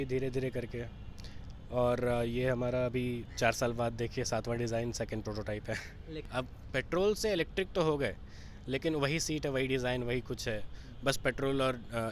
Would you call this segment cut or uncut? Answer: cut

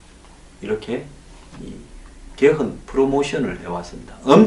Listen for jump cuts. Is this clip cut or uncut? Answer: cut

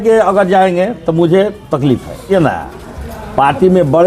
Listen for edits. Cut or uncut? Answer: cut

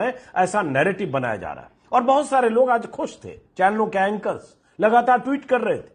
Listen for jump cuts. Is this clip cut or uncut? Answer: uncut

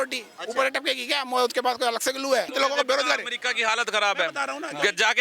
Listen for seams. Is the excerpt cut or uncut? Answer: cut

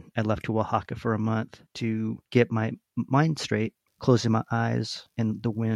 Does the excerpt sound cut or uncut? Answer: cut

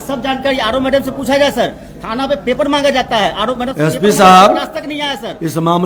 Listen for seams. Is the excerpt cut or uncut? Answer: uncut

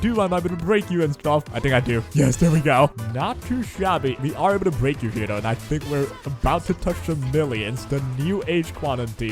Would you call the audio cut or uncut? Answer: cut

